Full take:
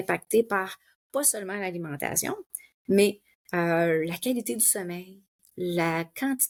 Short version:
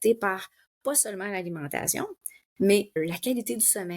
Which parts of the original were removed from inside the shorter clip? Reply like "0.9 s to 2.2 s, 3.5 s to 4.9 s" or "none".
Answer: 3.3 s to 4.0 s